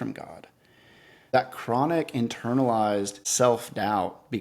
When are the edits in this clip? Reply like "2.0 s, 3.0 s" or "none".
1.3 s, 3.2 s